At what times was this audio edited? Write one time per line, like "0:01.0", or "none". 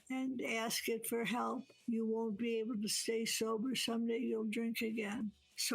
0:01.7